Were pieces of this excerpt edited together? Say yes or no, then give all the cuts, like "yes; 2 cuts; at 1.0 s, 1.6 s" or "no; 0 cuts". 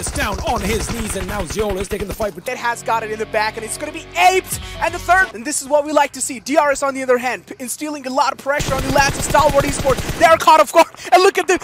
yes; 2 cuts; at 2.4 s, 5.4 s